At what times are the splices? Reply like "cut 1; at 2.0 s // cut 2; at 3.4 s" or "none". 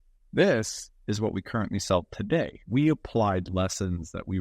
cut 1; at 2.6 s